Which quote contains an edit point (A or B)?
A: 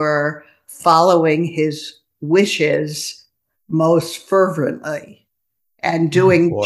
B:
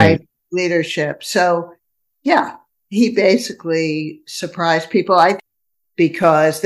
B